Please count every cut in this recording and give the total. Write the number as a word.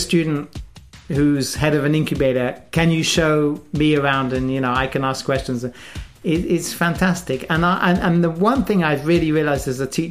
zero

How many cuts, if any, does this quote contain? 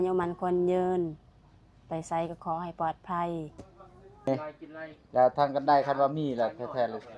one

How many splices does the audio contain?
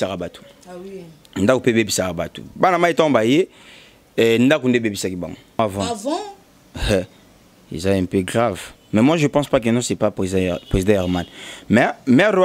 one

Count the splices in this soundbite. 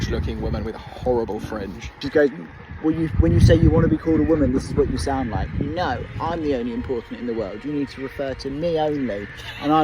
one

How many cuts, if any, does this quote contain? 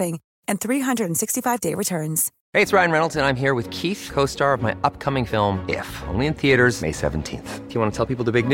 one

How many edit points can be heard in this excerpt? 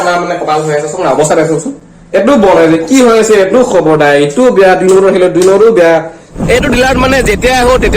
one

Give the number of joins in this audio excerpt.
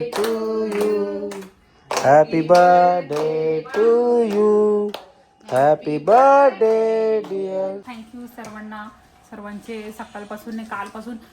one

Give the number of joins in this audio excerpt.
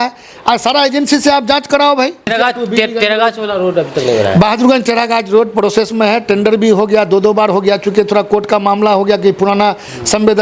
one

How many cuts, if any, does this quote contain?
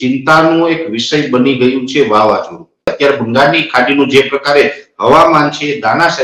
one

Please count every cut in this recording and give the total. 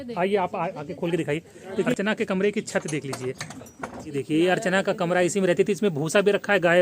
two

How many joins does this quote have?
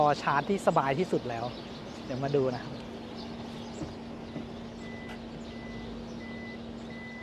zero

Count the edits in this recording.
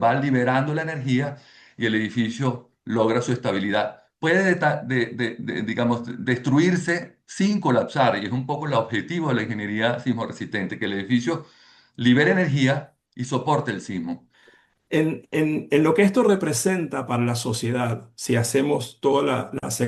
one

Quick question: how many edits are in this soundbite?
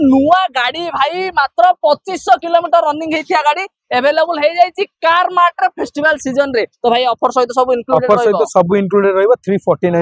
zero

